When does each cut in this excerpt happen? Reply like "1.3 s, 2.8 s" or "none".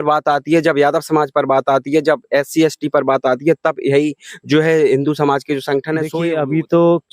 6.1 s